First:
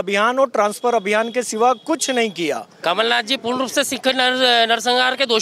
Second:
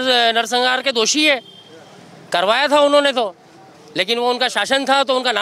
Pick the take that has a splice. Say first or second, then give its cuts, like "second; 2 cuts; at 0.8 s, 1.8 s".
first; 1 cut; at 2.7 s